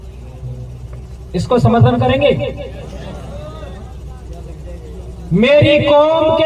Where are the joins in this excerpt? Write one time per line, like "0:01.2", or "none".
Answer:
none